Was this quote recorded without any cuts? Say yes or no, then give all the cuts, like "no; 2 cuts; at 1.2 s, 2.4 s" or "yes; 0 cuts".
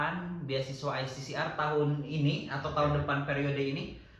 yes; 0 cuts